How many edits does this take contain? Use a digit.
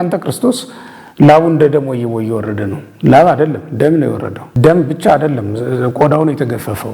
1